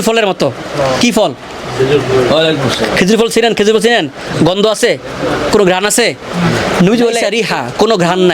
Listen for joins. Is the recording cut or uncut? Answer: cut